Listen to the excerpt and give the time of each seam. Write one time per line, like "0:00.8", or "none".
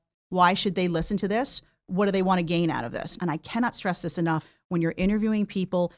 0:03.1
0:04.5